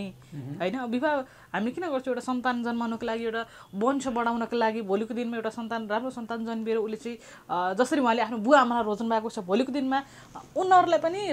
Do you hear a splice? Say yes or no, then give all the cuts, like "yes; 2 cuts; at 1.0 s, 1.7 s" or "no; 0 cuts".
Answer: no; 0 cuts